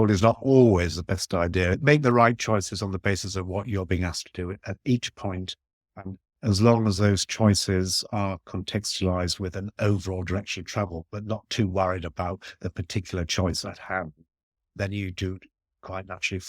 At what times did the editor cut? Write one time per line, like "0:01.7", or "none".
0:01.8
0:06.3
0:14.6